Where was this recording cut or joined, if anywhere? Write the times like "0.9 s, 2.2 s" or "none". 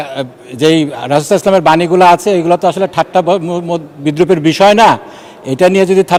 none